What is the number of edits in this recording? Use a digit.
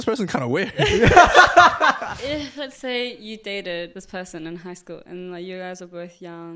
2